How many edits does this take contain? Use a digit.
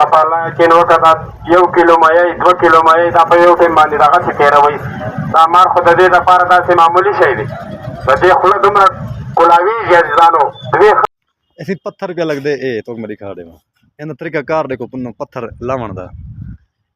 1